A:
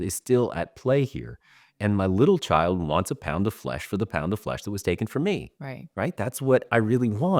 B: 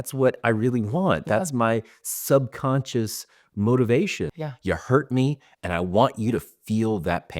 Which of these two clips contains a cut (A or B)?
B